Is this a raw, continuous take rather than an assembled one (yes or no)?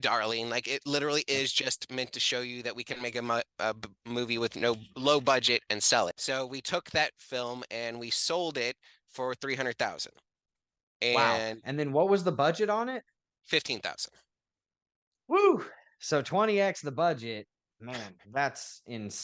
no